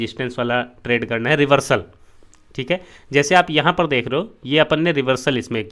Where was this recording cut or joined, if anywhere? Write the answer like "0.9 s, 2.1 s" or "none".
none